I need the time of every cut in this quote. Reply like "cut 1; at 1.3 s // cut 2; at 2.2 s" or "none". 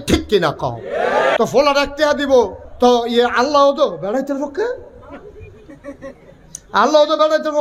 cut 1; at 1.4 s // cut 2; at 2.6 s